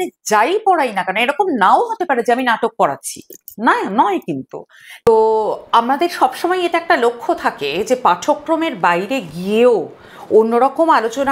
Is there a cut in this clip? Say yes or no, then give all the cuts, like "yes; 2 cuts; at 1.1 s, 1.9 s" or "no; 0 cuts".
yes; 1 cut; at 5.1 s